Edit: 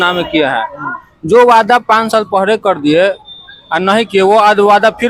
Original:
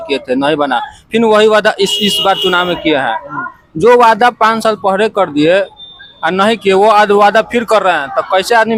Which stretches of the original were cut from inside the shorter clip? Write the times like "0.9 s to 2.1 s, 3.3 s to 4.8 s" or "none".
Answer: none